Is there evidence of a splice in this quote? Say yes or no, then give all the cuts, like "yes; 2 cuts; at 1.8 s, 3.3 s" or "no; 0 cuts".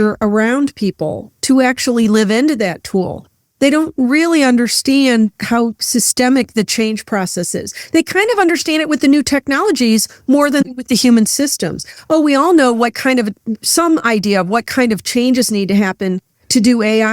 yes; 1 cut; at 10.6 s